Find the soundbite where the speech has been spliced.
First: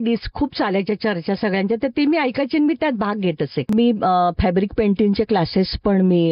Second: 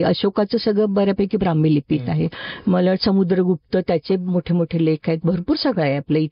first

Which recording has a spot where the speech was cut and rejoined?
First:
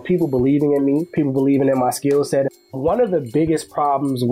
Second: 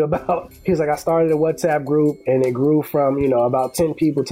first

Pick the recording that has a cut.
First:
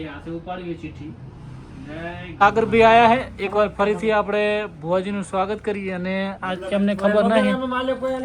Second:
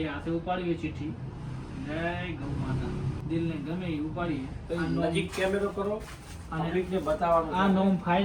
first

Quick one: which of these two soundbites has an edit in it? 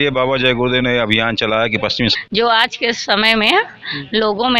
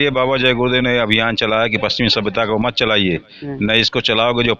first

